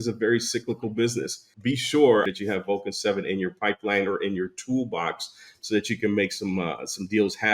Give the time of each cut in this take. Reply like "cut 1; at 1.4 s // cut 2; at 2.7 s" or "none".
cut 1; at 1.4 s // cut 2; at 2.3 s